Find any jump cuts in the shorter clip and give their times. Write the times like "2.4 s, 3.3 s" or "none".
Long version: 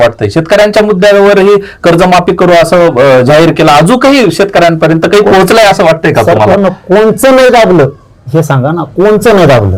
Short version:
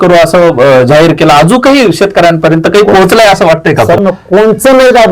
4.0 s